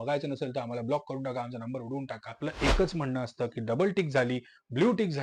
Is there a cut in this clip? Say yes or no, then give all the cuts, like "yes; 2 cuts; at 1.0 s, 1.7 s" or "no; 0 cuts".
yes; 1 cut; at 2.4 s